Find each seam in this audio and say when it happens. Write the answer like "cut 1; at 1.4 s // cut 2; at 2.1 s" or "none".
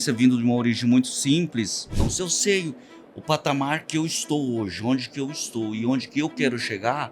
cut 1; at 2.0 s

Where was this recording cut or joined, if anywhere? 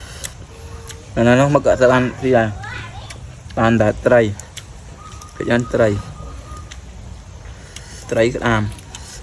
none

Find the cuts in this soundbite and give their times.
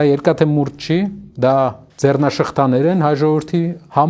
cut 1; at 1.2 s // cut 2; at 1.8 s

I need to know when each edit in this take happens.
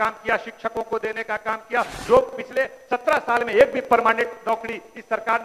cut 1; at 1.9 s

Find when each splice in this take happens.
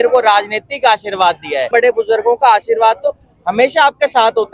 cut 1; at 1.7 s

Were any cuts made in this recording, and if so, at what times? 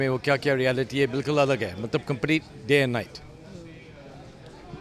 none

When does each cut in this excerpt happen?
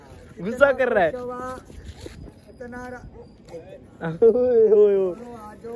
none

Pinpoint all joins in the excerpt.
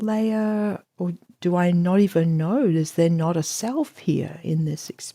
none

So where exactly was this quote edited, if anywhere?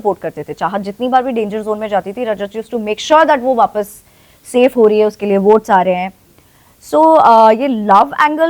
none

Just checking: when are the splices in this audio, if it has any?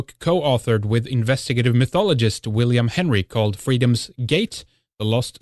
none

